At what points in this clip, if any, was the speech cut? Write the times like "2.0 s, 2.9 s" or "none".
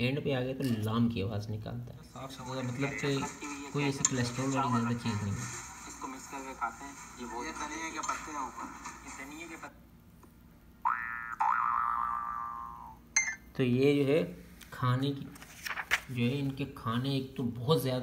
2.3 s